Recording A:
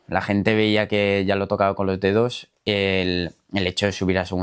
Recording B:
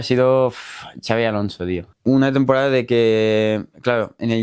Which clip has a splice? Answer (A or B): B